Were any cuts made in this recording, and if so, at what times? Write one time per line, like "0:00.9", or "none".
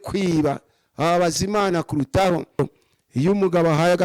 0:02.6